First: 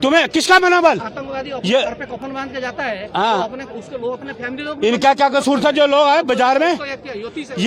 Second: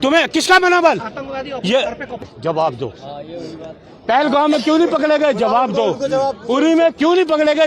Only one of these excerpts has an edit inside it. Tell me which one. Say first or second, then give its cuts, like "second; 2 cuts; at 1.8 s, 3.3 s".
second; 1 cut; at 2.3 s